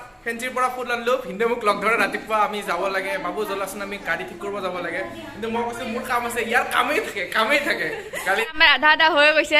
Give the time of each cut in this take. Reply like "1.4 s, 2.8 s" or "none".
8.2 s